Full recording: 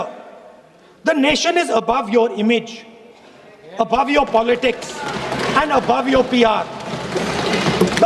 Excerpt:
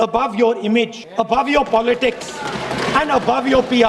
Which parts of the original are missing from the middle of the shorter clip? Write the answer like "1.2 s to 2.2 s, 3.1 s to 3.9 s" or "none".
2.7 s to 3.6 s